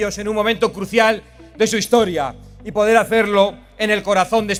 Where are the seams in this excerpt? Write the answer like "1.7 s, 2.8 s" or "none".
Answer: none